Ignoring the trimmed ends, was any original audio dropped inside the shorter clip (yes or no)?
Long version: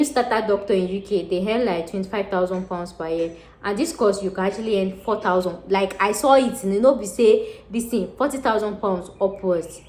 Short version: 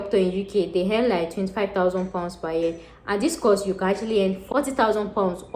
yes